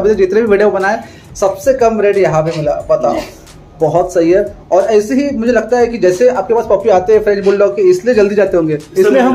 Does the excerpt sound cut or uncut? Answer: uncut